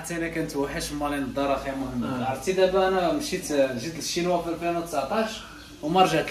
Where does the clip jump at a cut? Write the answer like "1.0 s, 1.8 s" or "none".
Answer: none